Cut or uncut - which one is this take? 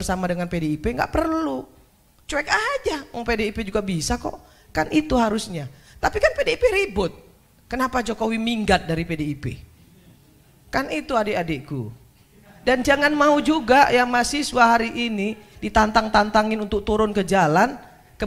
uncut